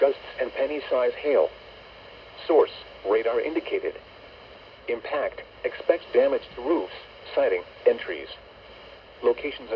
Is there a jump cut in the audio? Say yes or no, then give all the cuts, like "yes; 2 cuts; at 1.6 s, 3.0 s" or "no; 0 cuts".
no; 0 cuts